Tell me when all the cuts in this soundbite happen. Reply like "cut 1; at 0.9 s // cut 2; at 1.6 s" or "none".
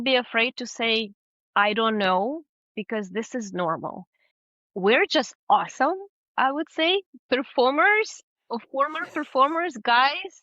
cut 1; at 4.5 s